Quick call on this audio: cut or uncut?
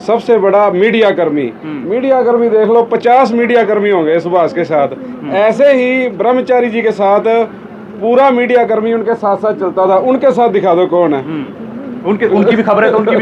uncut